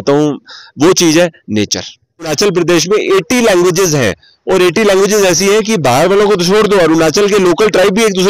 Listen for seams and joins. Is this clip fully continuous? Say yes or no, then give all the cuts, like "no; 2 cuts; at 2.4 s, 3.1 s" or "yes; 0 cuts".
no; 1 cut; at 2.3 s